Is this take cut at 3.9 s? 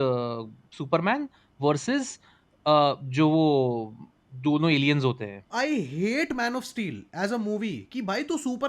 no; 1 cut; at 5.5 s

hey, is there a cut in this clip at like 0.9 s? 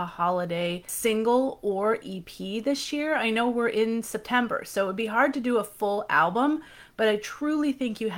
yes; 1 cut; at 0.9 s

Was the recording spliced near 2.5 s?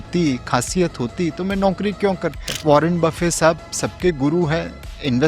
yes; 1 cut; at 2.5 s

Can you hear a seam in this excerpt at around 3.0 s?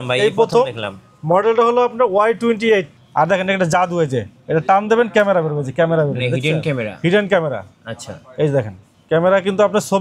yes; 1 cut; at 3.0 s

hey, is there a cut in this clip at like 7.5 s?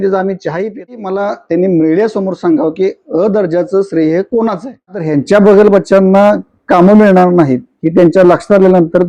no; 2 cuts; at 0.9 s, 5.1 s

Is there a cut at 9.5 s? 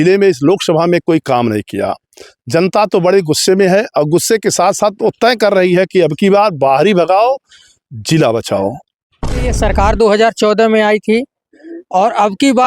yes; 1 cut; at 9.5 s

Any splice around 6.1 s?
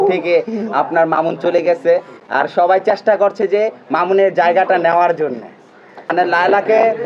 yes; 1 cut; at 6.1 s

